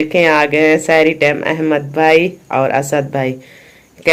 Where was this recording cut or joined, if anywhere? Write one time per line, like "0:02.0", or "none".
none